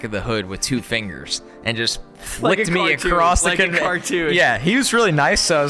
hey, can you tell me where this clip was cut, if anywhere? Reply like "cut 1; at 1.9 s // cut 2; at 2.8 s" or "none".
none